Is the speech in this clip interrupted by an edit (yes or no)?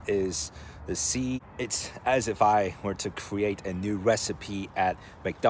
yes